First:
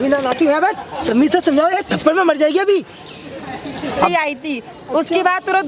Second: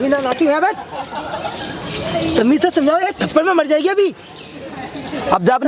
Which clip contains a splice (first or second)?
first